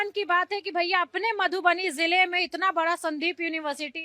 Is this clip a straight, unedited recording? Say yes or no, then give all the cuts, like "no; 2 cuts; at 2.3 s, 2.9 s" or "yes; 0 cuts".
yes; 0 cuts